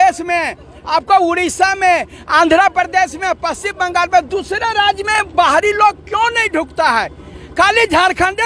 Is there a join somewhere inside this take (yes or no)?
no